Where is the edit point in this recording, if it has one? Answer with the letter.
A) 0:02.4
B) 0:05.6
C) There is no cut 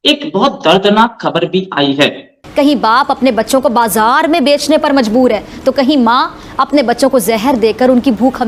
A